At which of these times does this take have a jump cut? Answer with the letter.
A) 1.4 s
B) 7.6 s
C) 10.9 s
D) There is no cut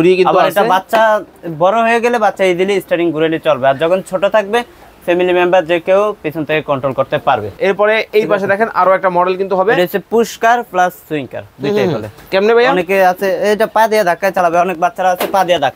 B